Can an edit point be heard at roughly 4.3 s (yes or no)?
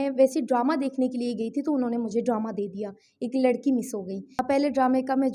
yes